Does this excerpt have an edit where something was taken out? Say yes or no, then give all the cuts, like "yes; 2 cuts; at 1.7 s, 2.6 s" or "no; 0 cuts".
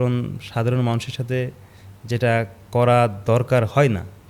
no; 0 cuts